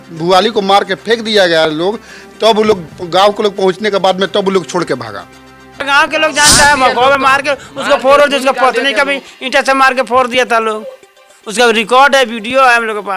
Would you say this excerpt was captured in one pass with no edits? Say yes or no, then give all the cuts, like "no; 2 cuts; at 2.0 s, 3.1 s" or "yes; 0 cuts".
no; 1 cut; at 5.8 s